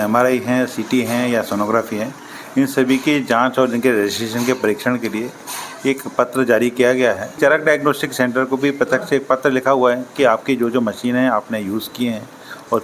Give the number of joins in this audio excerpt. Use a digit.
1